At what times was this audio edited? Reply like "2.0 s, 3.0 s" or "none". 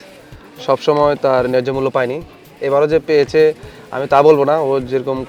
none